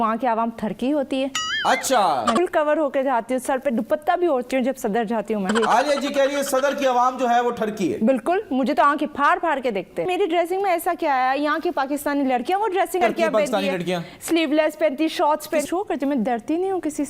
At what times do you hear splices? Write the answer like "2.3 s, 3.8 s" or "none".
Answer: 2.4 s, 5.5 s, 10.1 s, 13.0 s, 15.6 s

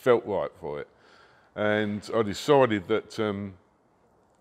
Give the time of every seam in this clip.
none

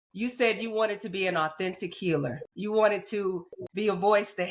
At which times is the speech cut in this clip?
2.4 s

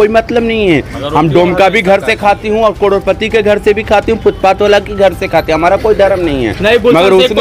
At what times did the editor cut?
none

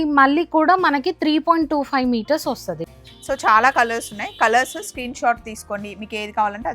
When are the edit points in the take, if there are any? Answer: 2.8 s

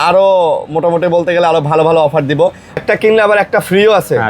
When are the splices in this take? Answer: 2.8 s

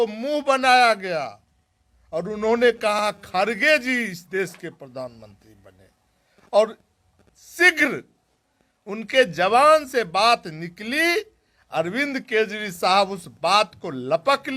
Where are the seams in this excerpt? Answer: none

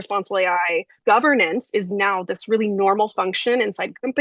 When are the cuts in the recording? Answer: 0.9 s

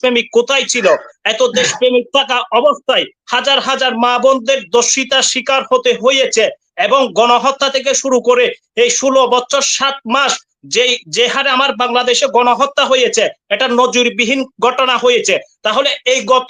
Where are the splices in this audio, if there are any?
none

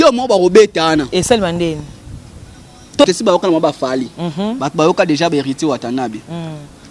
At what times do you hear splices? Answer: 3.0 s

